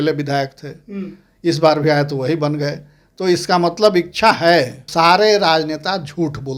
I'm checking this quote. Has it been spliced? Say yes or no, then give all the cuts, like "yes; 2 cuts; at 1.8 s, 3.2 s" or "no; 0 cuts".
yes; 1 cut; at 4.8 s